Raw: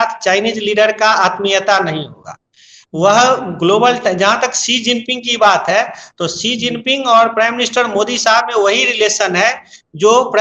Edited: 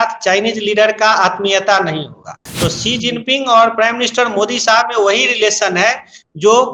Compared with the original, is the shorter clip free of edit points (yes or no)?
no